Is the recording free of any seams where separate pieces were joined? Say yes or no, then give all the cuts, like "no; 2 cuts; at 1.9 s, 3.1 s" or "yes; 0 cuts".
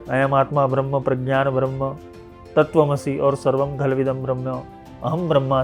yes; 0 cuts